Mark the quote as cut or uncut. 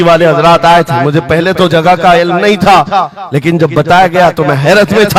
uncut